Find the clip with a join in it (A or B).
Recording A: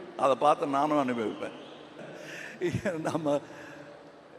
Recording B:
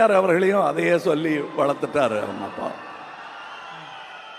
A